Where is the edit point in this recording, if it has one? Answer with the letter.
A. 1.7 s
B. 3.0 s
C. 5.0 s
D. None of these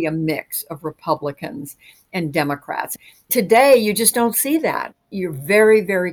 B